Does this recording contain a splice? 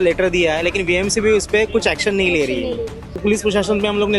yes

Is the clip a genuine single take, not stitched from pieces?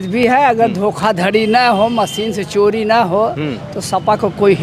yes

